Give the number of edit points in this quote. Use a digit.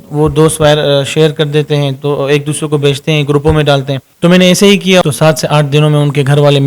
2